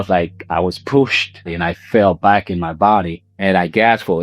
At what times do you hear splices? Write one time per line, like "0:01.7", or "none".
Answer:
0:01.4
0:03.2

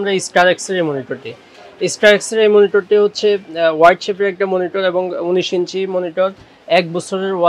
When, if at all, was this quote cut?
none

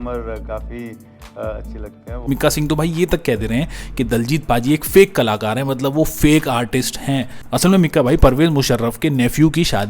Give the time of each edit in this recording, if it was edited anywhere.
0:02.3
0:07.4

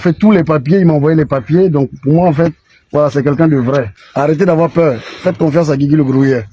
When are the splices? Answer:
0:04.0

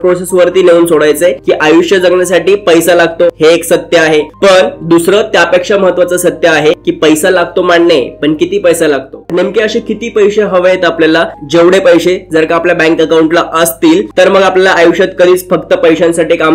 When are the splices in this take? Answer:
0:03.4
0:04.3
0:06.8
0:09.2

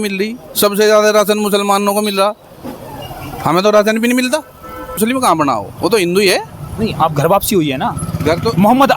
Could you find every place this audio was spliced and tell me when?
0:05.0

